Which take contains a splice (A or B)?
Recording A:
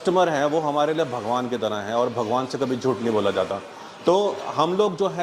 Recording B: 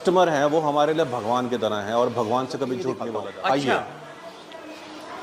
B